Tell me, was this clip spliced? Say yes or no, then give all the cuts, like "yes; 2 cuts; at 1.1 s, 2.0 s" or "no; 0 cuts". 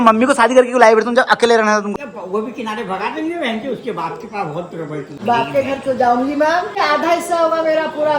yes; 3 cuts; at 1.9 s, 5.1 s, 6.8 s